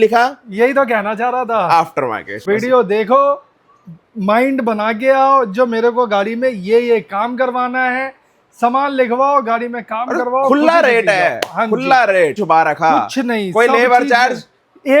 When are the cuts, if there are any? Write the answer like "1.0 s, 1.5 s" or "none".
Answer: 2.3 s, 12.4 s